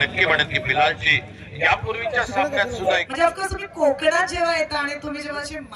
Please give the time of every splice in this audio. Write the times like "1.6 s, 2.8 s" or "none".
3.1 s